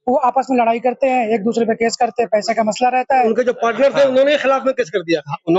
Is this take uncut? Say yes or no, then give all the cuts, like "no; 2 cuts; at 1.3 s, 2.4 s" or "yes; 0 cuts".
no; 1 cut; at 3.1 s